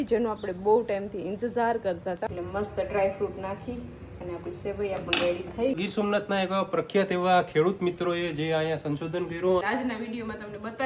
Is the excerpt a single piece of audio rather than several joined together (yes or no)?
no